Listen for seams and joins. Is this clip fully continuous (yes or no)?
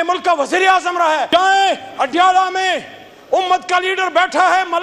no